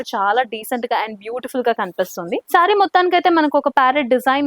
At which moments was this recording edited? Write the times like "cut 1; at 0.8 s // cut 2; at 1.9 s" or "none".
none